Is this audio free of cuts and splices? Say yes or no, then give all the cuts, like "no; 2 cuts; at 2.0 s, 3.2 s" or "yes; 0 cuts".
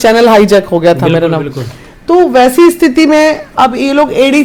yes; 0 cuts